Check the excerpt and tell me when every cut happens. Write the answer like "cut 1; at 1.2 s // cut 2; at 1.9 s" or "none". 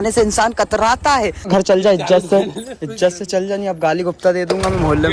cut 1; at 1.4 s